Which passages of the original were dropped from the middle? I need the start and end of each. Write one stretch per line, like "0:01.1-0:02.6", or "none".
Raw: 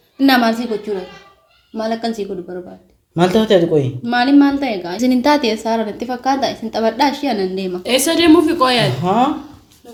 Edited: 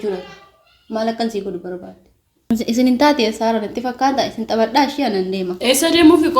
0:03.2-0:04.6

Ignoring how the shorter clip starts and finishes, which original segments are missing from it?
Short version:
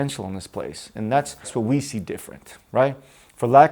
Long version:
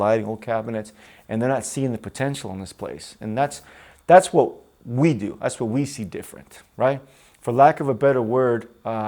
0:03.8-0:05.6

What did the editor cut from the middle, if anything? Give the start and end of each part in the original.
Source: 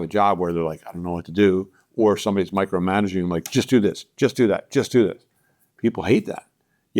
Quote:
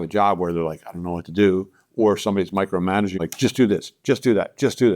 0:03.2-0:03.3

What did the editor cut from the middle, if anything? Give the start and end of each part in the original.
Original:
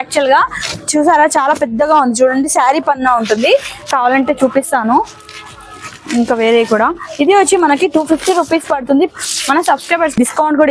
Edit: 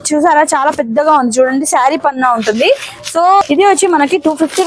0:04.0-0:06.8

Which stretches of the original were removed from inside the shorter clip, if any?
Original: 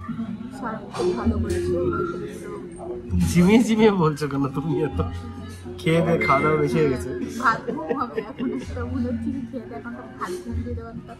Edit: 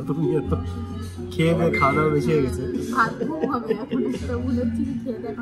none

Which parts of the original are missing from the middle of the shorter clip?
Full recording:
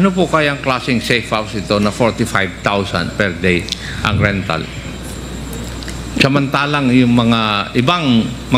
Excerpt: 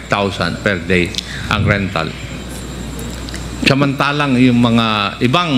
none

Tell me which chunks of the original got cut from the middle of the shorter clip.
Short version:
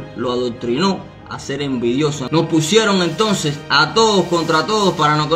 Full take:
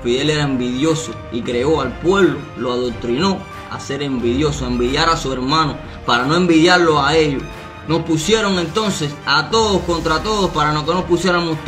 0:04.6-0:07.8

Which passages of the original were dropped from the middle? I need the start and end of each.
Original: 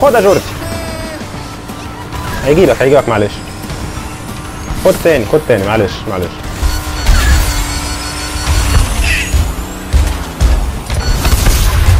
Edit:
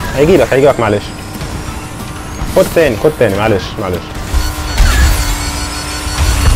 none

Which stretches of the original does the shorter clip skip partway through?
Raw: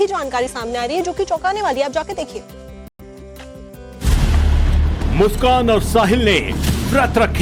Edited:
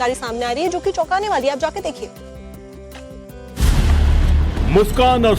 0:02.9-0:03.0

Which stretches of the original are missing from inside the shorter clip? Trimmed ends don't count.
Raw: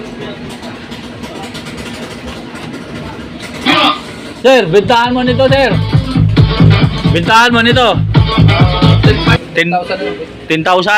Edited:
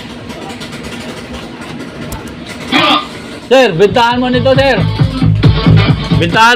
none

